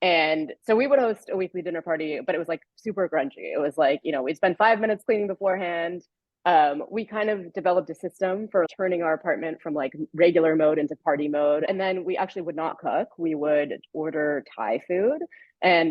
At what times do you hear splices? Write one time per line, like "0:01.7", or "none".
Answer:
0:08.7
0:11.7